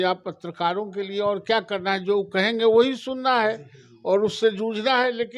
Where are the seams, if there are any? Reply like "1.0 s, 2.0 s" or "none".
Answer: none